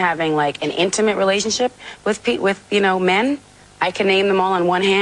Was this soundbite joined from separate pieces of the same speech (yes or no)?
no